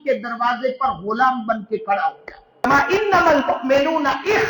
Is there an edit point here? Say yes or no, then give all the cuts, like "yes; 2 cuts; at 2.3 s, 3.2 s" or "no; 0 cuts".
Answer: yes; 1 cut; at 2.6 s